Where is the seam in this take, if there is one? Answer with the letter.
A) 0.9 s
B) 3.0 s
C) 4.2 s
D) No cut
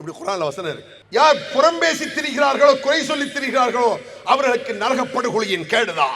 A